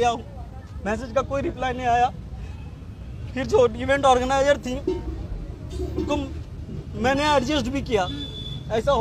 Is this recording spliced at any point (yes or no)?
no